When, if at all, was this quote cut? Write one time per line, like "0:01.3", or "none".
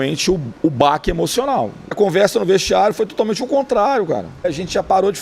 0:02.0
0:04.5